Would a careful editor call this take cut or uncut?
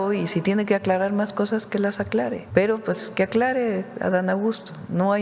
cut